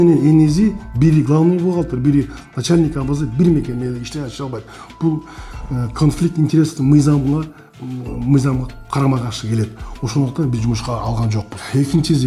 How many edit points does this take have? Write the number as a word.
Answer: zero